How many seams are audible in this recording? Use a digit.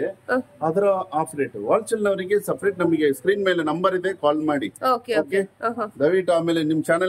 0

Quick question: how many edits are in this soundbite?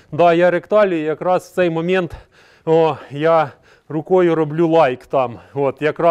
0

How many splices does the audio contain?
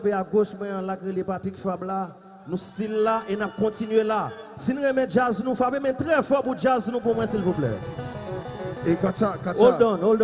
1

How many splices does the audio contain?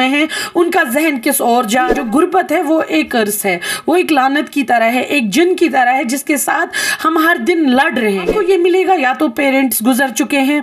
2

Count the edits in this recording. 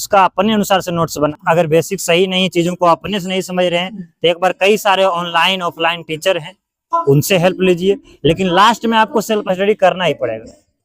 1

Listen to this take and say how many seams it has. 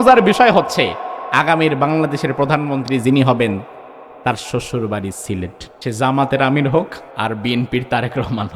2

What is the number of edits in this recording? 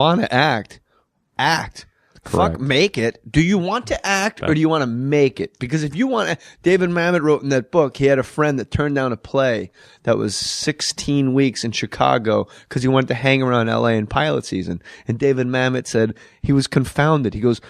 1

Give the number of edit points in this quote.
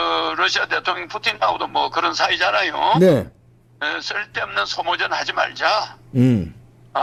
0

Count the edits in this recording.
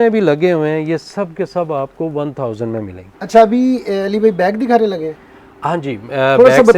0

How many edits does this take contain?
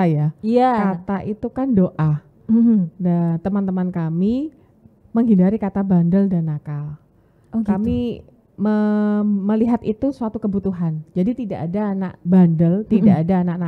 0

